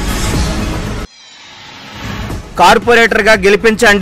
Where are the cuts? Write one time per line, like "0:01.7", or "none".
0:00.7
0:02.0